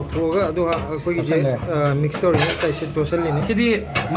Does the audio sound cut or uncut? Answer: uncut